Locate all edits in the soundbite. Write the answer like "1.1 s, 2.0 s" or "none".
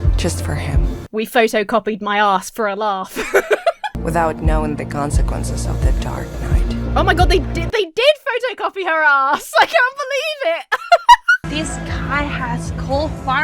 4.0 s, 11.4 s